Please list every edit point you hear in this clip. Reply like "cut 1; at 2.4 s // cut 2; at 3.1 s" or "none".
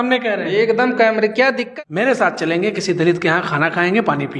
cut 1; at 1.6 s